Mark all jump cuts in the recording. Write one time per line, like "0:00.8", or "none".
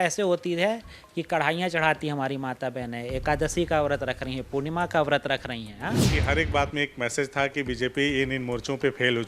0:06.1

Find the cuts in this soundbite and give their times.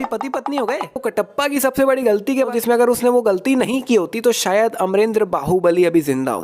0:01.0
0:02.5

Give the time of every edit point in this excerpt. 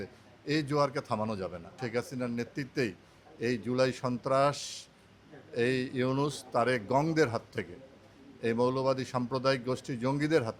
0:01.8

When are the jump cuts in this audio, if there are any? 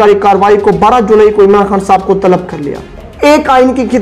0:03.0

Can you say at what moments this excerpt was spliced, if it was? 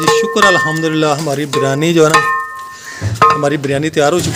none

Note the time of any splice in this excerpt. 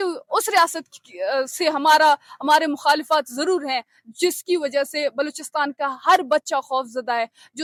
none

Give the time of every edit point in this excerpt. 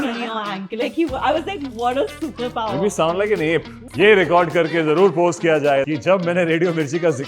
0:03.8
0:05.9

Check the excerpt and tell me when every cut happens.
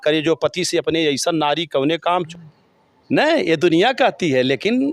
0:02.3

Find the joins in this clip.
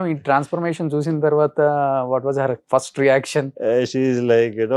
none

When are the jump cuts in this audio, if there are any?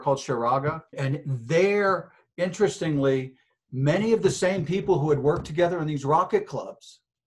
0:01.0

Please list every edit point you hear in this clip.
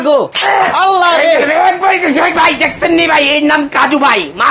none

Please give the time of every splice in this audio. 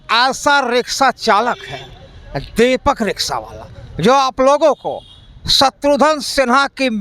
none

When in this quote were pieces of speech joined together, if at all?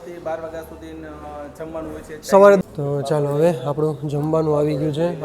0:02.6

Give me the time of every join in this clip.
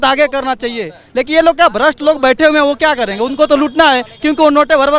none

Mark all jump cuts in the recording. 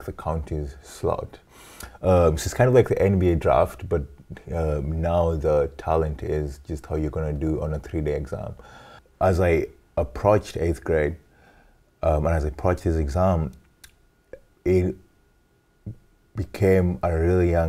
0:09.0

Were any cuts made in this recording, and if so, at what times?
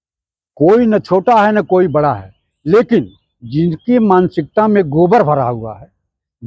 none

